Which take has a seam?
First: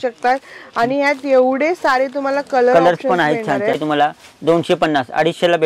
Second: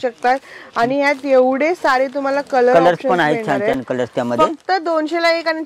first; 1 cut; at 3.8 s

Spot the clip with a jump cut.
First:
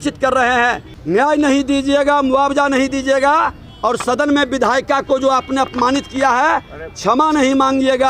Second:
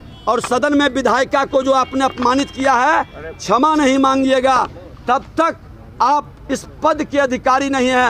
first; 1 cut; at 0.9 s

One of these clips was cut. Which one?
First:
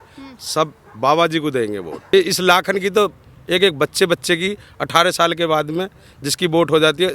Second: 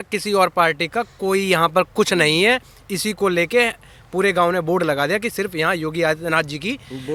first; 1 cut; at 2.1 s

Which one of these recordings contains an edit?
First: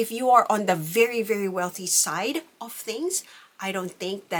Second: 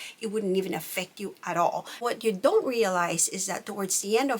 second; 1 cut; at 2.0 s

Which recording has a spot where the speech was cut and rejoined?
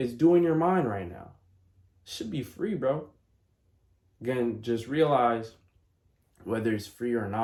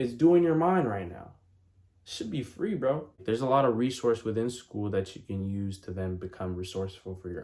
second; 1 cut; at 3.2 s

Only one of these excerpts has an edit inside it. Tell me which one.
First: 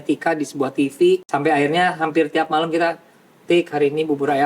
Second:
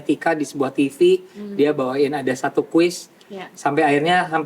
first; 1 cut; at 1.2 s

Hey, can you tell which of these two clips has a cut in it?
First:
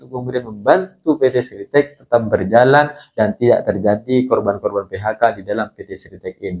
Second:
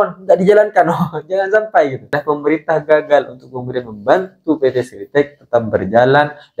second; 1 cut; at 2.1 s

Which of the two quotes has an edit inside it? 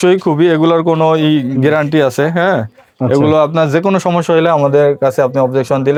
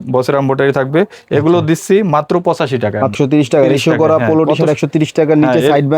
second; 1 cut; at 3.1 s

